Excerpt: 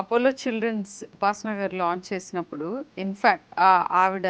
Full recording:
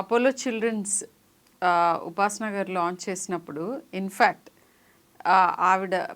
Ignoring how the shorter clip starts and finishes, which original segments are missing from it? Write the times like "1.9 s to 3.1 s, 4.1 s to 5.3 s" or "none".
1.1 s to 2.1 s, 4.4 s to 5.1 s